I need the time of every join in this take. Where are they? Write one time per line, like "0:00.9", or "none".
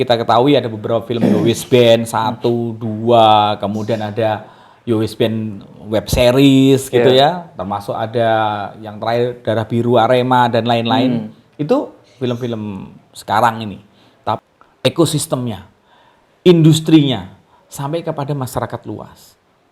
0:14.4